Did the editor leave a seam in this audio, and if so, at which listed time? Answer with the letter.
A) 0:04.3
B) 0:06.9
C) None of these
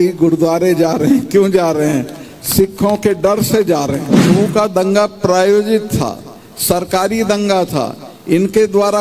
A